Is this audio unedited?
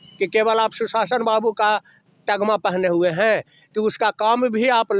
yes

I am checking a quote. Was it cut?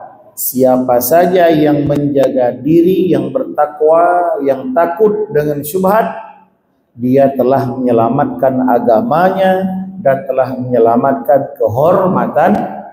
no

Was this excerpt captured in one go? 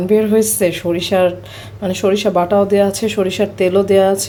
yes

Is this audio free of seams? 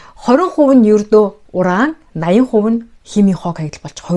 yes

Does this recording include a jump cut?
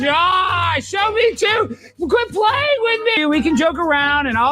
yes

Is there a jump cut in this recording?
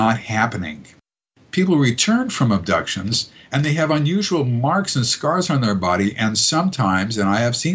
no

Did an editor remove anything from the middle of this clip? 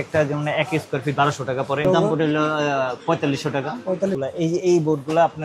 yes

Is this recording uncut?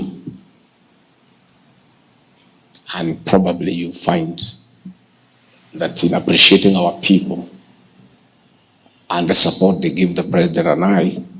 no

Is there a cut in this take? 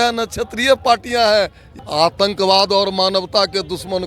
yes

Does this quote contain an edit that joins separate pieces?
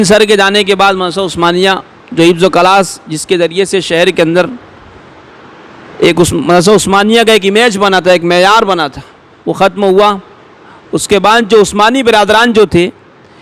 no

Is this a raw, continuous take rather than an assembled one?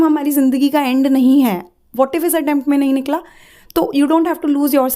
yes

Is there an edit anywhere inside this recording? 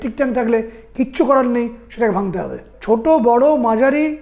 yes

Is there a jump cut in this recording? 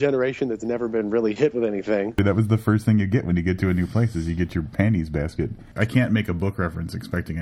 yes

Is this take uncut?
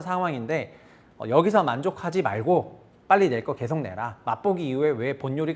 yes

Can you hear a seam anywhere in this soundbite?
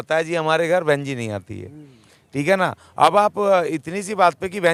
no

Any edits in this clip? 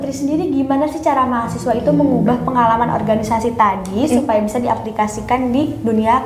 no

